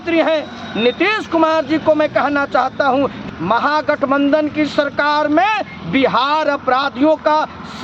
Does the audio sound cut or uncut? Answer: cut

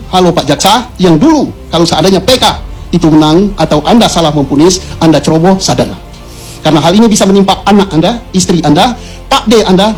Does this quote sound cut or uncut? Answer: uncut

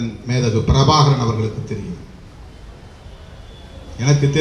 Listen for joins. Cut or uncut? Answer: uncut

